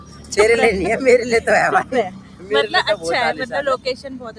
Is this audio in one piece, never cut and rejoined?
yes; 0 cuts

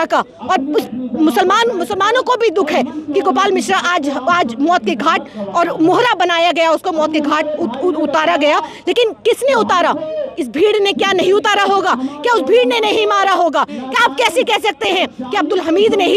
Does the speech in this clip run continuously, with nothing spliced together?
yes; 0 cuts

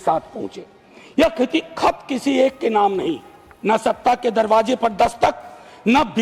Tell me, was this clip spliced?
no; 0 cuts

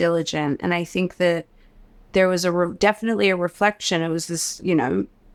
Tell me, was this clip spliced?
no; 0 cuts

